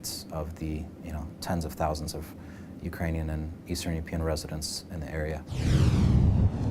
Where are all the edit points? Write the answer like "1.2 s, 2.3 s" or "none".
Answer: 5.6 s